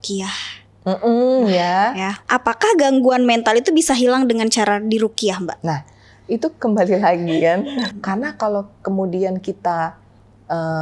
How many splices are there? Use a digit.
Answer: 2